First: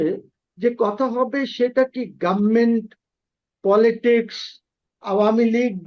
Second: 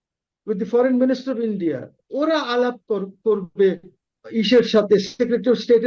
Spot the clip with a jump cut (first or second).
second